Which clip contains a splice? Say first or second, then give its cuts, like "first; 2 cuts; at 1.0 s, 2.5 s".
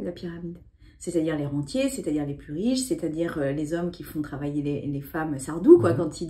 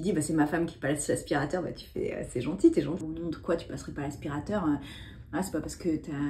second; 1 cut; at 3.0 s